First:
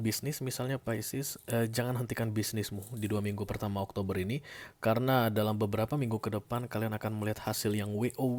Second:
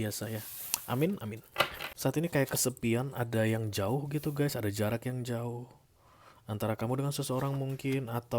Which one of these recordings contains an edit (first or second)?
second